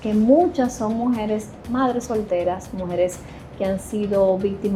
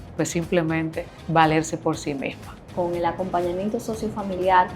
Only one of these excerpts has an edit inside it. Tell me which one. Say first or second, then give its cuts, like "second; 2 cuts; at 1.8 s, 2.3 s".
second; 1 cut; at 2.7 s